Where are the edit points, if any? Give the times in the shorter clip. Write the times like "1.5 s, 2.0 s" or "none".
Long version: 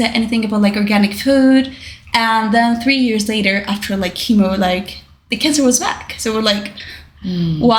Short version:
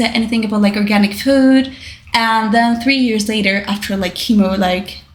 none